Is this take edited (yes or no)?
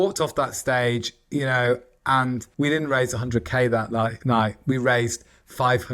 no